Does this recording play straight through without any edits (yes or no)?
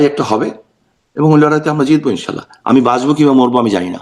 yes